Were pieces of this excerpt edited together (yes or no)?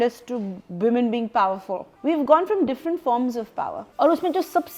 yes